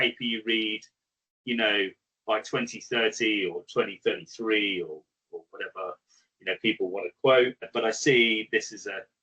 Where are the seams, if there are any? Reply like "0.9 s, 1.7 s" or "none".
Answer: 7.7 s